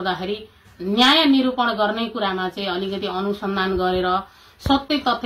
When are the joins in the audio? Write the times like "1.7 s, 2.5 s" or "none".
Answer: none